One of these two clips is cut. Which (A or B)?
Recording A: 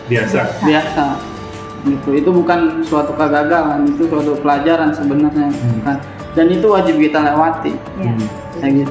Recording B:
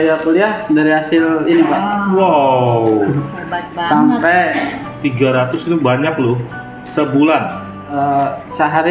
B